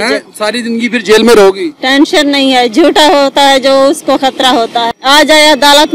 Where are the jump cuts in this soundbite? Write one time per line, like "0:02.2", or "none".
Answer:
0:04.9